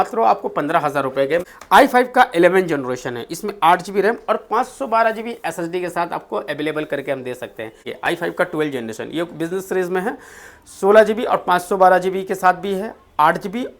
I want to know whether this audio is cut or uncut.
cut